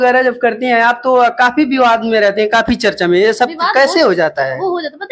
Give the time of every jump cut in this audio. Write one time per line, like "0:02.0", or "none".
none